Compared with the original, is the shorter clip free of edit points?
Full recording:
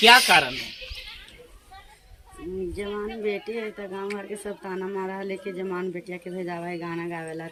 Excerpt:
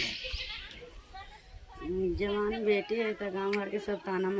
yes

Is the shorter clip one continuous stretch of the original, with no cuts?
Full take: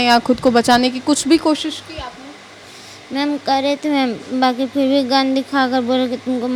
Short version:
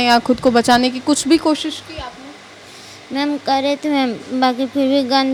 yes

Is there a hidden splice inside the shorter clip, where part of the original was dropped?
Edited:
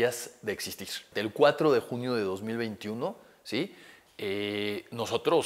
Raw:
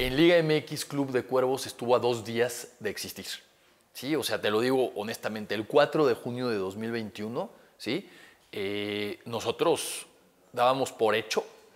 yes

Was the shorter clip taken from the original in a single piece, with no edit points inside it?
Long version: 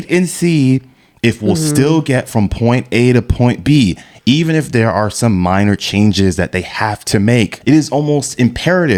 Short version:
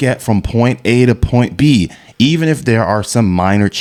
yes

